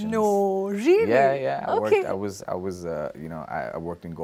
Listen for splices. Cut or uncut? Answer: uncut